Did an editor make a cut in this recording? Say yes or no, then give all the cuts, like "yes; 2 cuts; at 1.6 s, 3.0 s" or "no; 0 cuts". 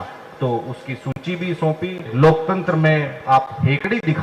yes; 1 cut; at 2.1 s